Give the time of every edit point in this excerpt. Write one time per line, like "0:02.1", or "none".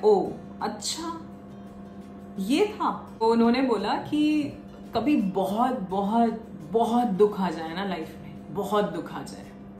0:03.2